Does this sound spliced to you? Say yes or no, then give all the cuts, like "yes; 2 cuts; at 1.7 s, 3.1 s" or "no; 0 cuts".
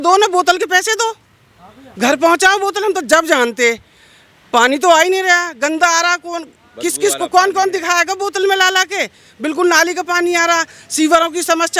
no; 0 cuts